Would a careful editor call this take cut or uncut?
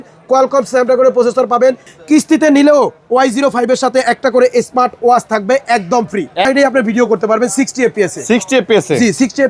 cut